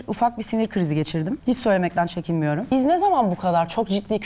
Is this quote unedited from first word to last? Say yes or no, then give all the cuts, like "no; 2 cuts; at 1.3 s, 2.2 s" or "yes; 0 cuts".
no; 2 cuts; at 1.4 s, 2.7 s